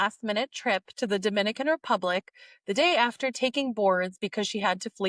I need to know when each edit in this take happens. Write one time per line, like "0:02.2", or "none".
none